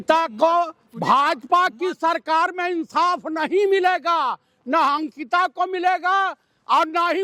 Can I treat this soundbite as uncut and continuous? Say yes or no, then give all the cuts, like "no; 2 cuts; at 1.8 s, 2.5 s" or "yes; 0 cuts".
yes; 0 cuts